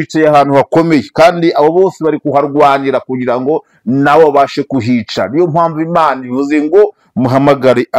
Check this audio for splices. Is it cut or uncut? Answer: uncut